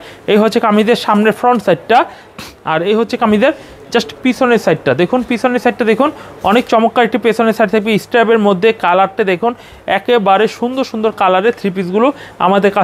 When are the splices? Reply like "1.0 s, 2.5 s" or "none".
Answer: none